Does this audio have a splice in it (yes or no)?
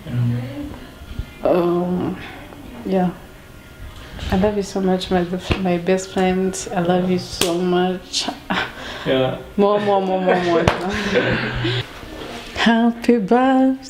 yes